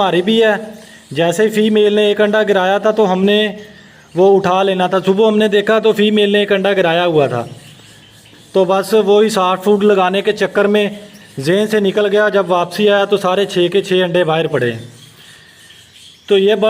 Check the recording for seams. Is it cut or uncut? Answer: uncut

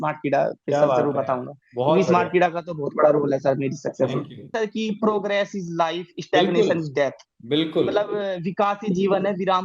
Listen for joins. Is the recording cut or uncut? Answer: cut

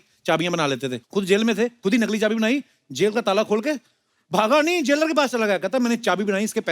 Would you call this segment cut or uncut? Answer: cut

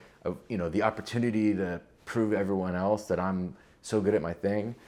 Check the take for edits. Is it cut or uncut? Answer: uncut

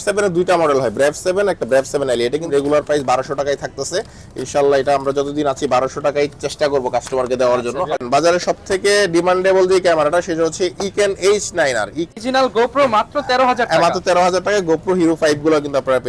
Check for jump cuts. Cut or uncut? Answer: cut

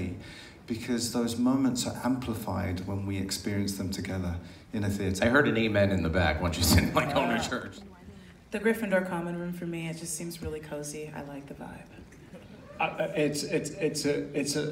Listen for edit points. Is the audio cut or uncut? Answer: cut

